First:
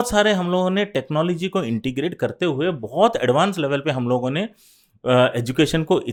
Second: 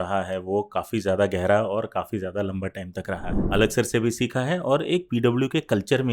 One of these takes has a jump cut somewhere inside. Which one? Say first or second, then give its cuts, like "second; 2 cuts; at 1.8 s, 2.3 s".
second; 1 cut; at 3.4 s